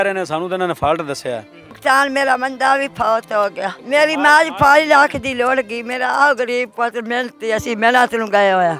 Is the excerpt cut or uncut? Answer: cut